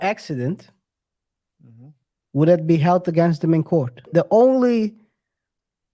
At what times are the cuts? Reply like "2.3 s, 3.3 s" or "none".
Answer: 4.1 s